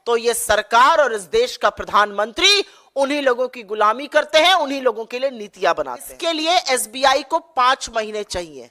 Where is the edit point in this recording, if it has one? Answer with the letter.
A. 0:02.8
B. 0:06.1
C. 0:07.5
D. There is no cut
B